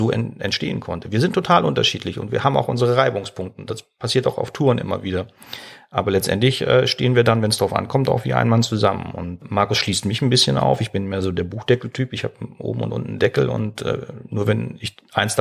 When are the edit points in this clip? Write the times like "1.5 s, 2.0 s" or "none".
9.4 s